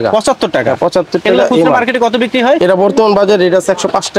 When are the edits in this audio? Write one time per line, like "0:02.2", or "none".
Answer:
none

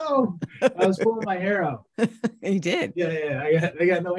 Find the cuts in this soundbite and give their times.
0:01.8
0:02.9

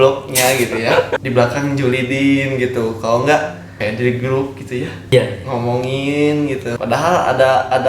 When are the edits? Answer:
0:01.1
0:03.7
0:05.1
0:06.8

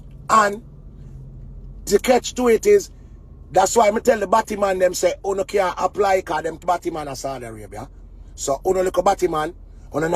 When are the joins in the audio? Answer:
0:06.6

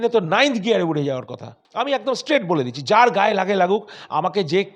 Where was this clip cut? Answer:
0:01.6

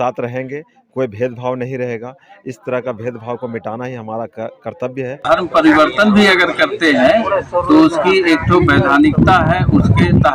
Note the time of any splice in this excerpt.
0:05.2

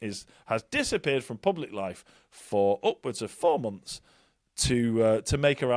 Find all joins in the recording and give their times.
none

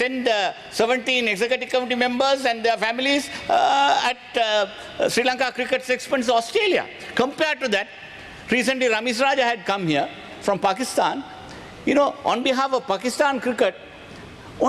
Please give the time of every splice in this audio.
none

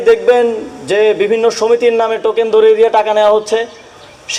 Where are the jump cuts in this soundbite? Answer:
none

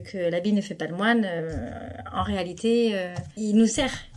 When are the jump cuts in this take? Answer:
0:03.2

